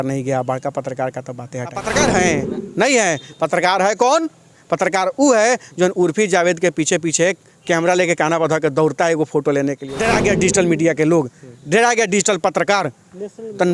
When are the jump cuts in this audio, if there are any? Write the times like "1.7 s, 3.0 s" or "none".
1.8 s, 9.9 s